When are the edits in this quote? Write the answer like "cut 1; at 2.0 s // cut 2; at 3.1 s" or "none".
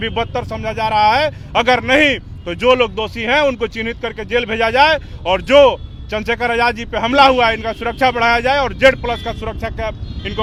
none